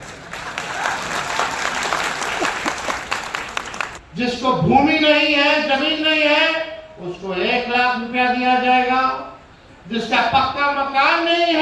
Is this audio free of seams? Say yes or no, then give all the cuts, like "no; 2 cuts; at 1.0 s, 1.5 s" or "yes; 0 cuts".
no; 1 cut; at 3.9 s